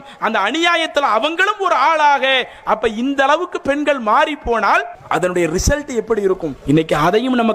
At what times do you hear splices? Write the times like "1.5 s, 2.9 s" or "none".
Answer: 5.0 s, 6.5 s

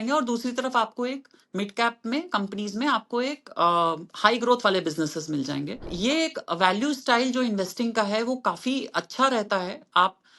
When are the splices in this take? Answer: 5.9 s

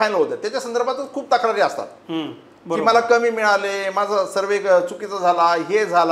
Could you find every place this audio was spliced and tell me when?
none

